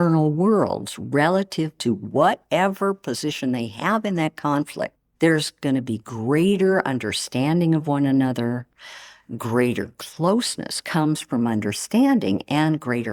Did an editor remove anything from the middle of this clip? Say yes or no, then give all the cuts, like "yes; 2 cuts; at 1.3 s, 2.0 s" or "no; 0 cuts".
no; 0 cuts